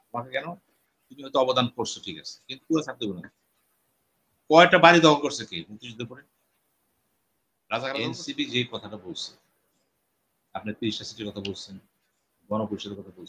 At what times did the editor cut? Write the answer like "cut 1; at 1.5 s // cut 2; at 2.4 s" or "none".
cut 1; at 8.1 s